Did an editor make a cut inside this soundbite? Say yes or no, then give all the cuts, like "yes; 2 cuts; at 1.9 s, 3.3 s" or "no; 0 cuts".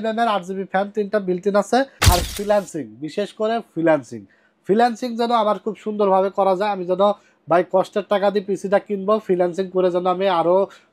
yes; 1 cut; at 2.0 s